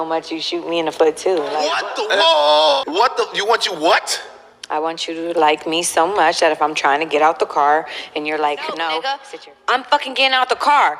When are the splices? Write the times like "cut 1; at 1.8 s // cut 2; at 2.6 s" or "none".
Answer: cut 1; at 1.6 s // cut 2; at 2.8 s // cut 3; at 9.2 s

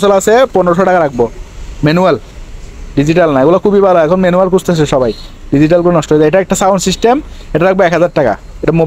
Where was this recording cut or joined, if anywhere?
none

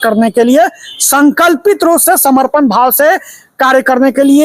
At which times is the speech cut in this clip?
none

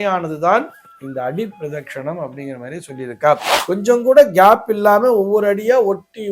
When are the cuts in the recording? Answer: cut 1; at 3.5 s

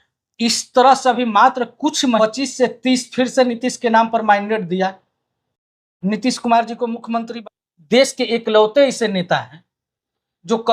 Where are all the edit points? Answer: cut 1; at 2.2 s // cut 2; at 7.3 s

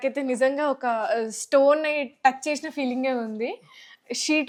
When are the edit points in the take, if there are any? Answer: none

